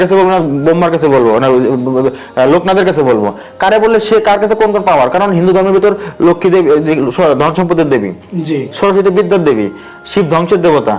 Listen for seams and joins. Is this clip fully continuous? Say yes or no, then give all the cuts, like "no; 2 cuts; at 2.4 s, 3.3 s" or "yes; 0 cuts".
yes; 0 cuts